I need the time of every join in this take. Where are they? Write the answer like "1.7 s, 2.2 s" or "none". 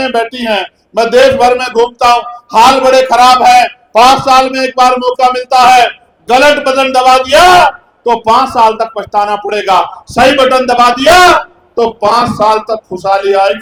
none